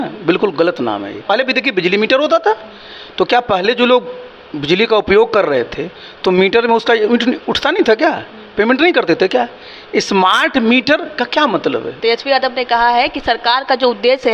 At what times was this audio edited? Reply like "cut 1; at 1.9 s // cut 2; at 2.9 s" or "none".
cut 1; at 1.2 s // cut 2; at 11.9 s